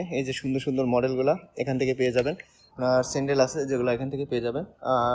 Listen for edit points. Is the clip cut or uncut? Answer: cut